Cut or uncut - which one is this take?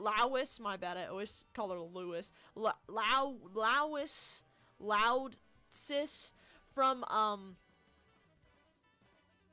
cut